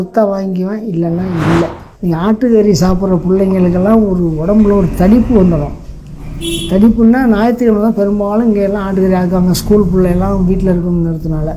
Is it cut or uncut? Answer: cut